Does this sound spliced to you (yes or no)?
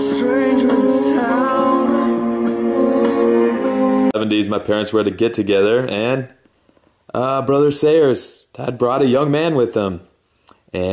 yes